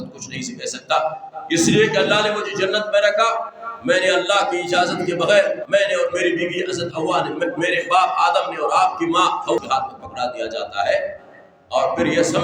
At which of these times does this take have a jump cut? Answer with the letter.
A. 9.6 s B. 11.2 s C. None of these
A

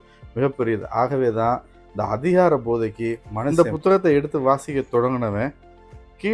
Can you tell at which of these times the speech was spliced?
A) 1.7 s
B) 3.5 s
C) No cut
B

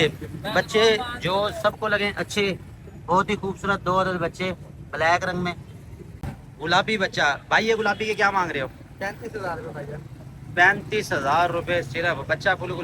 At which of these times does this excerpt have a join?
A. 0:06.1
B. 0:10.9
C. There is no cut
A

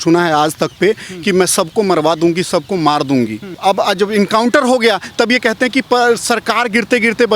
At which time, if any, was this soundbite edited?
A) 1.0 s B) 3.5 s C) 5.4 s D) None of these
B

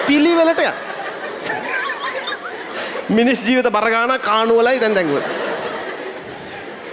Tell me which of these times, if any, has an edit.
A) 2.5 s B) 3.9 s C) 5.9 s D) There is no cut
D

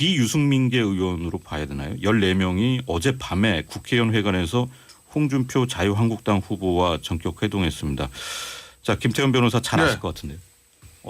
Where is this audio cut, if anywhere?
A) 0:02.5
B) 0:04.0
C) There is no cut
A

